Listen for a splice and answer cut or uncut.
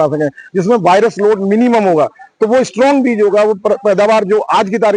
uncut